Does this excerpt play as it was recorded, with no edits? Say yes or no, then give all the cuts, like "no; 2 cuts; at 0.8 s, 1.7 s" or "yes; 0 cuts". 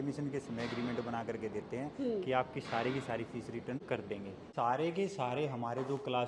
no; 1 cut; at 3.9 s